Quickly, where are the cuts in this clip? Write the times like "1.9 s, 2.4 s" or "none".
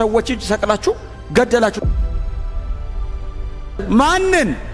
none